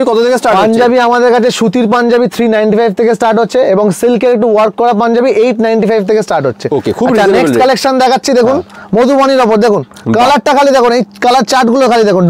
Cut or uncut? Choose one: uncut